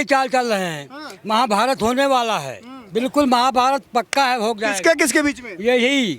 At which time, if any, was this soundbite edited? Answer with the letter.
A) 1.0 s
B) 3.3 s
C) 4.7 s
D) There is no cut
D